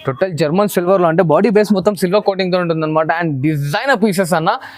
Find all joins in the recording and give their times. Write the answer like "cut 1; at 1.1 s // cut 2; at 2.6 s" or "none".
none